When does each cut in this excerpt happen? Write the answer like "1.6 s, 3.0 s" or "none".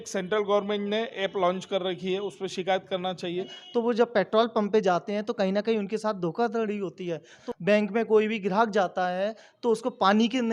3.6 s, 7.4 s

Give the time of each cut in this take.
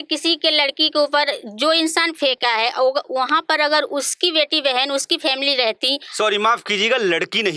none

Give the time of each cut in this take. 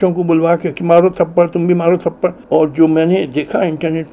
2.4 s

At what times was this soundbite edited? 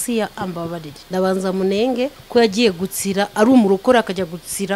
0.9 s, 2.2 s

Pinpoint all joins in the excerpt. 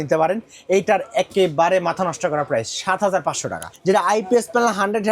3.7 s

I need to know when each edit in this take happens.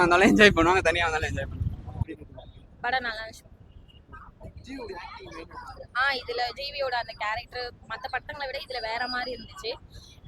2.1 s

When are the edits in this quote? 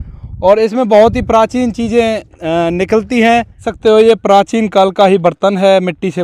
3.7 s

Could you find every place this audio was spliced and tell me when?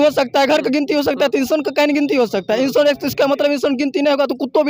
none

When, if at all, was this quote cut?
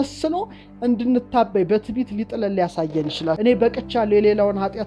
3.4 s

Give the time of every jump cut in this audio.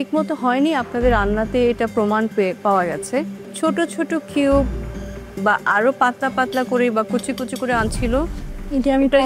3.5 s

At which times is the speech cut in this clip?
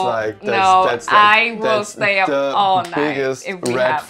none

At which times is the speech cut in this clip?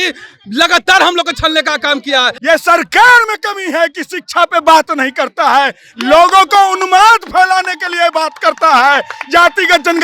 2.3 s

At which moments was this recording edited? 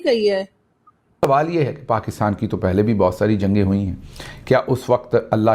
1.3 s

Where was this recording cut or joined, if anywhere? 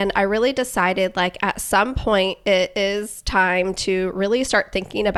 none

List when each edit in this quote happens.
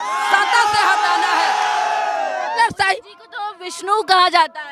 2.6 s

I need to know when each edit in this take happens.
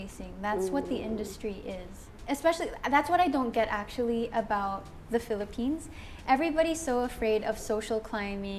none

